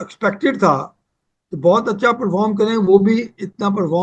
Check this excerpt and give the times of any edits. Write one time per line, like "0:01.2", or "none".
none